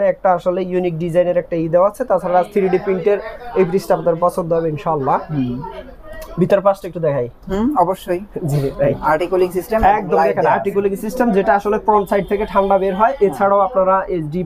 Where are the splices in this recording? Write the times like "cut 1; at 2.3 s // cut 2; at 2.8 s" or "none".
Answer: none